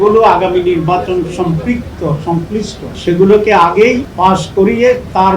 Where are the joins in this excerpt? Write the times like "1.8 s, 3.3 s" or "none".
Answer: 2.8 s, 4.1 s